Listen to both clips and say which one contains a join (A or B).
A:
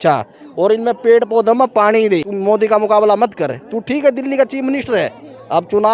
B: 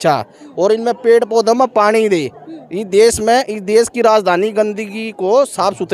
A